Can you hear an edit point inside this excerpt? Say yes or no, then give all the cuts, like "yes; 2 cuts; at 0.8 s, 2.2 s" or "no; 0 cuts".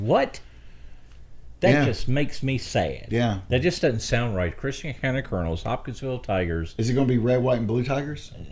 yes; 1 cut; at 3.5 s